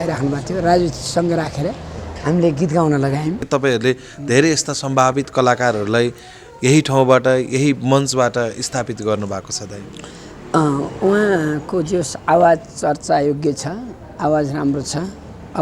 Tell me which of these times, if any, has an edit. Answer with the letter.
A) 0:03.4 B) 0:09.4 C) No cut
A